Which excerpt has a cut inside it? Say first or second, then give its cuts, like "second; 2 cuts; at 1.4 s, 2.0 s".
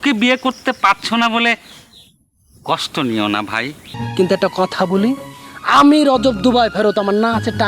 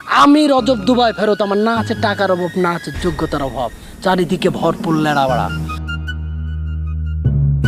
first; 1 cut; at 3.9 s